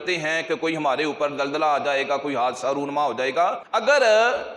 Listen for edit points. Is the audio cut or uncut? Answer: cut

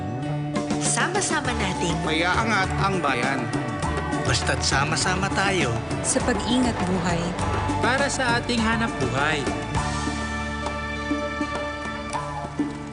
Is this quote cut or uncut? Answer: uncut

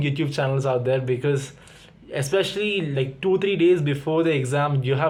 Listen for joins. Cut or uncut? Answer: uncut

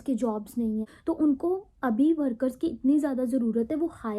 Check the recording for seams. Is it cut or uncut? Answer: cut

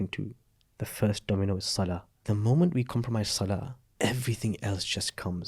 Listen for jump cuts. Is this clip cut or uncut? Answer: cut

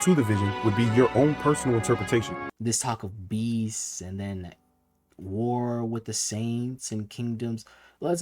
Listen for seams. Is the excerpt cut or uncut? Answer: cut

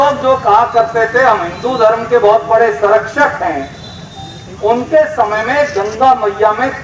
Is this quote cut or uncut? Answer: uncut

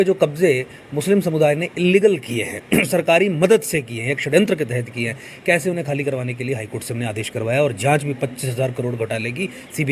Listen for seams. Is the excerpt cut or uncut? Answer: uncut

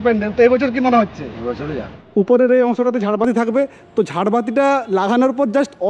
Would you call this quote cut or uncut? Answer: cut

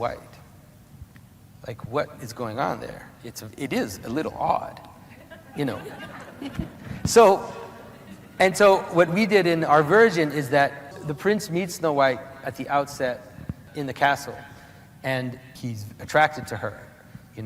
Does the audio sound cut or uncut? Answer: cut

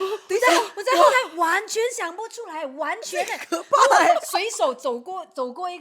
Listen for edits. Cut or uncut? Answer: uncut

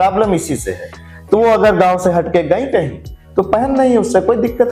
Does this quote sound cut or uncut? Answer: uncut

